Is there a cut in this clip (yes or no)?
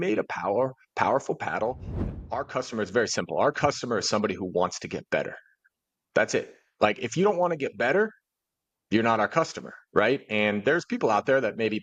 yes